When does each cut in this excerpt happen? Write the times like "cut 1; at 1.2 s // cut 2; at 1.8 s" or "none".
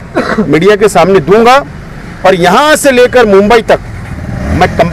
none